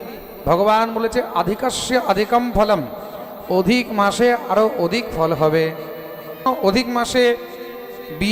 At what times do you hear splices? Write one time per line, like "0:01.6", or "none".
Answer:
0:06.4